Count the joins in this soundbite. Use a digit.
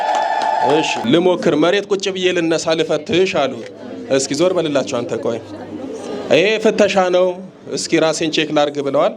1